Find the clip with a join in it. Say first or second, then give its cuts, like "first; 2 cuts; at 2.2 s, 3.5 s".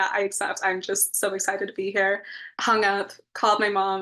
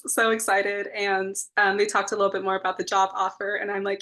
first; 1 cut; at 2.5 s